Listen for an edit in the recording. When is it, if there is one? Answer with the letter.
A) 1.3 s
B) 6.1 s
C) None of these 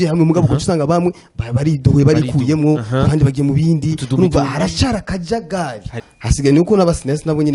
B